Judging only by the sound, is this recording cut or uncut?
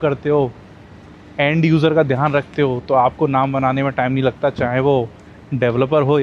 uncut